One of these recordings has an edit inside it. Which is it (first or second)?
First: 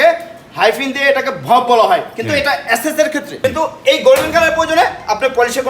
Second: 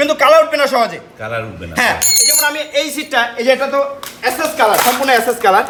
first